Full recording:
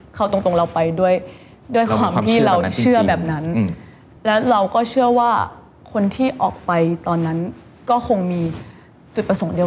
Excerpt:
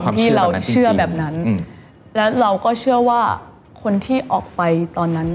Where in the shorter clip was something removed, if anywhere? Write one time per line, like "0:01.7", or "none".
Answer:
none

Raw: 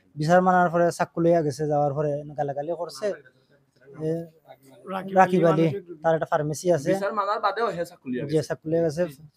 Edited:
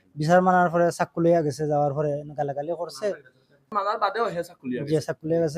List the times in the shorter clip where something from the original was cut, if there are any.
0:03.7

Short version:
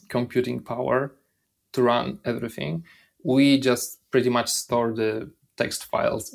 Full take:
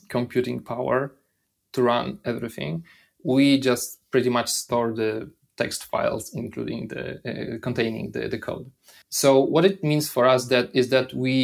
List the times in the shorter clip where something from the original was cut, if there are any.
none

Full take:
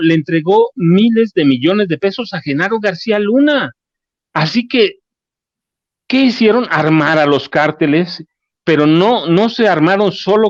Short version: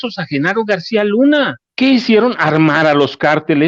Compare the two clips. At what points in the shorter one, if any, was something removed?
0:01.6

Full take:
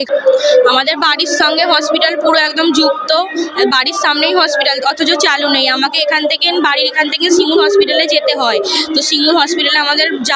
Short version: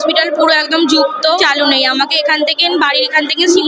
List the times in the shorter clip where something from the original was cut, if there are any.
0:01.4

